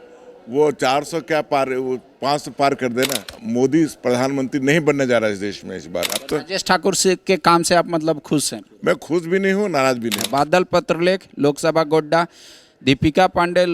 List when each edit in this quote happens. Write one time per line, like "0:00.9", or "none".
0:03.3
0:06.2
0:10.2